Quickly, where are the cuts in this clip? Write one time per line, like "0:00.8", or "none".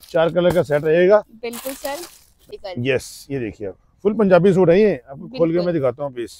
0:02.5